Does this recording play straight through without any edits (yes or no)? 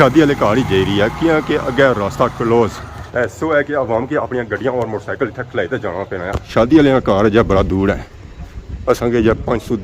no